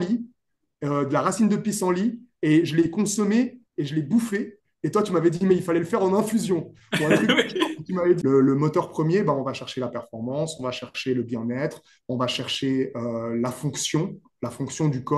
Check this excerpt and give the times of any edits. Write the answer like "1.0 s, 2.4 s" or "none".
8.2 s